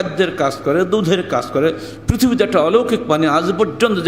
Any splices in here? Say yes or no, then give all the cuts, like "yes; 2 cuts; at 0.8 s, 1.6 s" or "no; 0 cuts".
no; 0 cuts